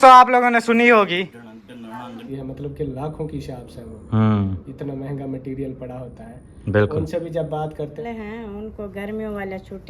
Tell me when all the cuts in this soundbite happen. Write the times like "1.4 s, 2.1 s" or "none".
2.2 s, 8.0 s